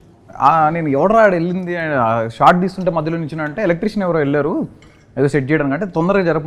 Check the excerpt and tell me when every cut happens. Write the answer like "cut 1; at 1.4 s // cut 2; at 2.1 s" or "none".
none